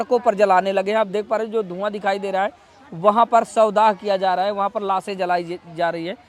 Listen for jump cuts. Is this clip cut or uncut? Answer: uncut